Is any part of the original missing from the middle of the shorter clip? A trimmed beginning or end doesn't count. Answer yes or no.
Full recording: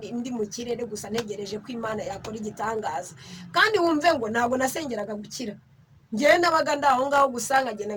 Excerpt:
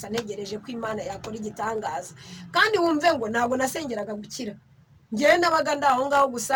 no